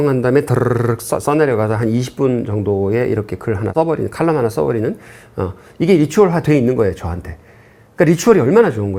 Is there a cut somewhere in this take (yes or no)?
no